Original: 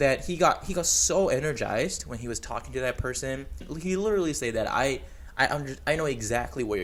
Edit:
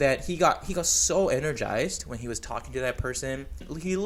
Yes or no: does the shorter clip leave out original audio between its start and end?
no